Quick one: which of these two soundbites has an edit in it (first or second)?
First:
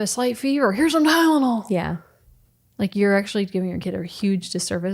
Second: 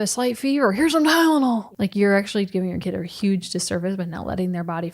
second